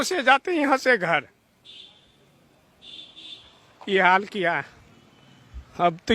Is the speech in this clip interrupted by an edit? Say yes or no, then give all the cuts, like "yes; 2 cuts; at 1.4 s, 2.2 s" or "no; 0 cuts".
no; 0 cuts